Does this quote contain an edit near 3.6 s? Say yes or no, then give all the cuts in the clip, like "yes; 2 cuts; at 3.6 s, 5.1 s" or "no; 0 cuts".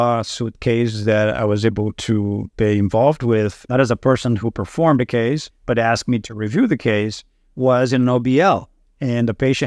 yes; 2 cuts; at 3.6 s, 5.5 s